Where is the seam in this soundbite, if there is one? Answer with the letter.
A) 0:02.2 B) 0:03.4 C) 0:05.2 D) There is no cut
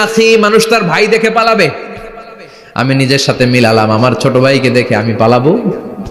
D